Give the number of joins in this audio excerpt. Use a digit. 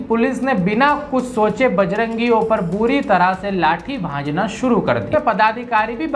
1